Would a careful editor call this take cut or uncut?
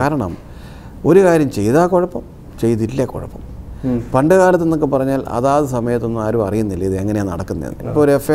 uncut